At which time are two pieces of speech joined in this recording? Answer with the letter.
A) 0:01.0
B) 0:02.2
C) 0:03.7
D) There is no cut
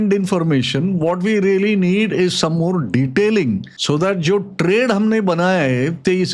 C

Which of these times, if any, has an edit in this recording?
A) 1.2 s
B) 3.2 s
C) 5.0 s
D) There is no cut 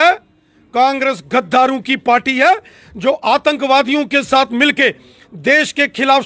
D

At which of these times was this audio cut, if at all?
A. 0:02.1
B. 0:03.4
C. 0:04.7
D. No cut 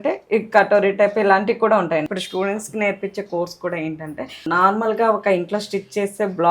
A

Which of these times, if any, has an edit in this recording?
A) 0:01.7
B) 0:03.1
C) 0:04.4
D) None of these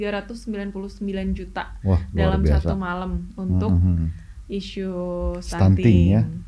D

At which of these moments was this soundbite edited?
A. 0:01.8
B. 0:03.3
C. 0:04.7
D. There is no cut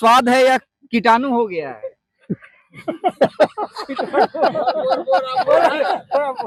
D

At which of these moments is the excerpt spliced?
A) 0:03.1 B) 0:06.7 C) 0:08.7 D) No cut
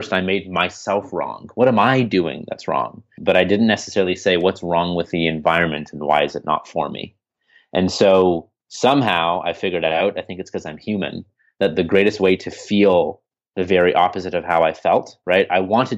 A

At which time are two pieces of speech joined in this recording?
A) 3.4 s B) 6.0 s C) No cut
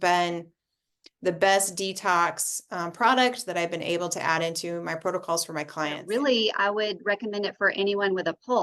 B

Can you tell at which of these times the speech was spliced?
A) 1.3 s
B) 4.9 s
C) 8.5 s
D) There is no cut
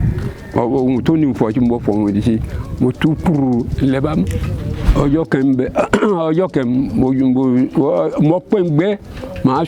B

